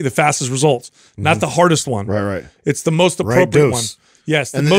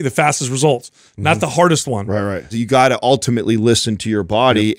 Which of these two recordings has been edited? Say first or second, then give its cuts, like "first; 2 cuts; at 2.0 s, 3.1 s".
second; 1 cut; at 2.5 s